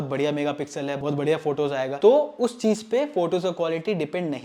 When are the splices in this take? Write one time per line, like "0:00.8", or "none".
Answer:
none